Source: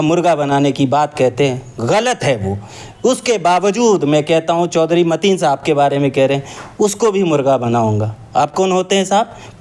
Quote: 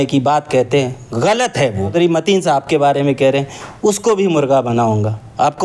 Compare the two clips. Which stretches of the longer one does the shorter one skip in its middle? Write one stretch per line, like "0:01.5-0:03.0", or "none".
0:02.6-0:04.9